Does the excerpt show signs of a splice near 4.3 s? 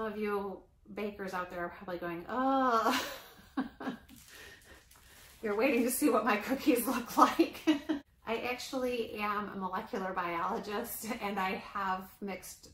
no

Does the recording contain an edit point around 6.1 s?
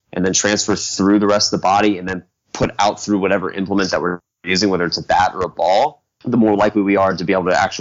yes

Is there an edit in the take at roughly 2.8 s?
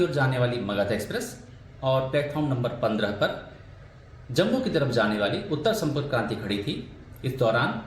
yes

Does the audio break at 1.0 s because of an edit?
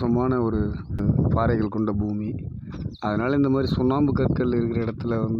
yes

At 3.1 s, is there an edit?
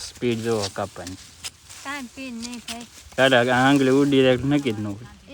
yes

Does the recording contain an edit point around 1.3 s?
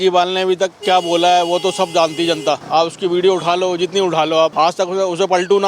no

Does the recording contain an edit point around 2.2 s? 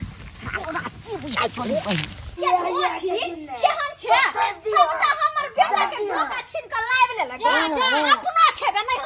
yes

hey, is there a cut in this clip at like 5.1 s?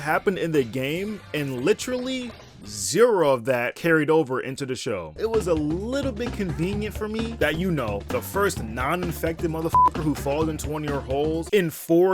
yes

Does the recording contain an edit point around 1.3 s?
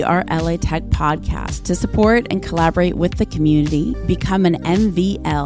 no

